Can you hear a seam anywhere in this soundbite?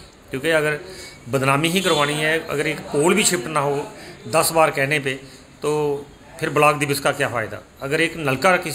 no; 0 cuts

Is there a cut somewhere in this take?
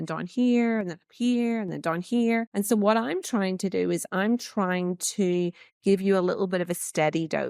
yes; 1 cut; at 2.5 s

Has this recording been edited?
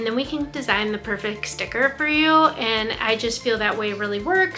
no; 0 cuts

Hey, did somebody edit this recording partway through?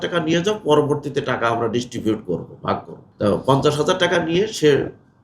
yes; 1 cut; at 3.0 s

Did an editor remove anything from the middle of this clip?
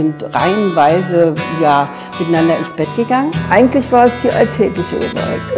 yes; 1 cut; at 3.4 s

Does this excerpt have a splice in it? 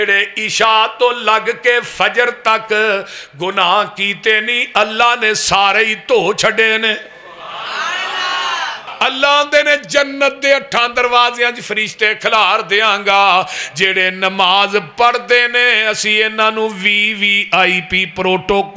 yes; 1 cut; at 8.9 s

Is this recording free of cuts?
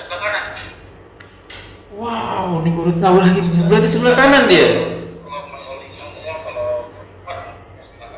yes; 0 cuts

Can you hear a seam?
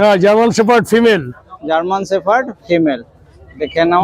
no; 0 cuts

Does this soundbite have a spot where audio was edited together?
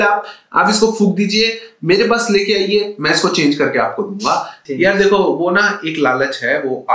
yes; 1 cut; at 4.6 s

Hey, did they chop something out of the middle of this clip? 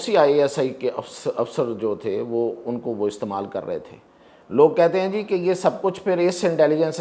no; 0 cuts

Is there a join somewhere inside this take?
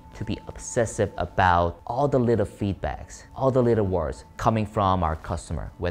no; 0 cuts

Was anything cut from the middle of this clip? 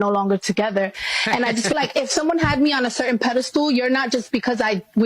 yes; 1 cut; at 1.7 s

